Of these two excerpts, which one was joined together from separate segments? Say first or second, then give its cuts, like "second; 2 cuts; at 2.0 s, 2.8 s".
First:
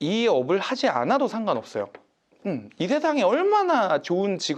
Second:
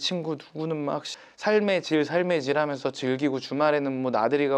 second; 1 cut; at 1.1 s